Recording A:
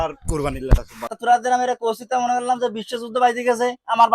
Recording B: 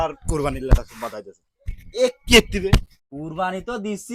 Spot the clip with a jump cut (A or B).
A